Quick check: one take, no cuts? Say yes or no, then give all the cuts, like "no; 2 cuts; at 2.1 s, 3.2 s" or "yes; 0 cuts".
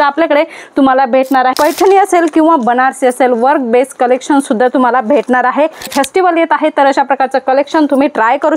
no; 2 cuts; at 1.5 s, 5.9 s